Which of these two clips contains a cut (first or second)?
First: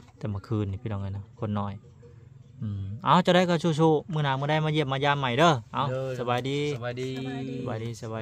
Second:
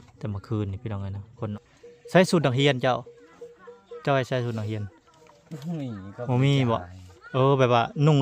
second